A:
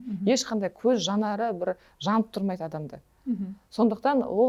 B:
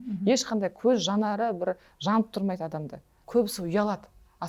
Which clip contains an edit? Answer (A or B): B